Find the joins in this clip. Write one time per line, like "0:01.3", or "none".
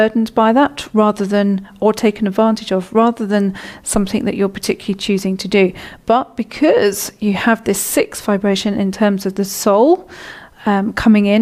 none